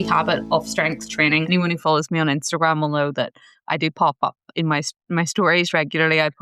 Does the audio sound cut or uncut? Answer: cut